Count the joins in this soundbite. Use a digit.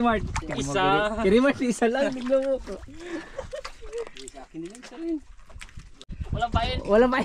1